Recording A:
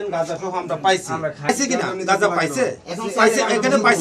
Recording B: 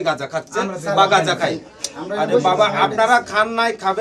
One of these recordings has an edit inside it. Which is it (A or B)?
A